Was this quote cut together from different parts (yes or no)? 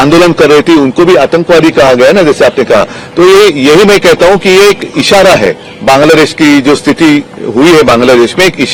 no